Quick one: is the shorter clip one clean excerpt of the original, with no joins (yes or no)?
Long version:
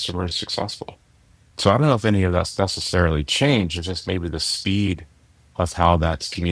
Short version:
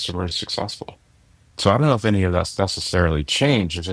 yes